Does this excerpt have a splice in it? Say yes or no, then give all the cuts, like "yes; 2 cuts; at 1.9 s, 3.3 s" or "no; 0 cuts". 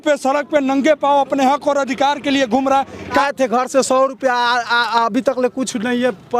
yes; 1 cut; at 3.2 s